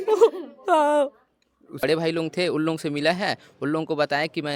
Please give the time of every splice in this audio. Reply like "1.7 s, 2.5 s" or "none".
1.8 s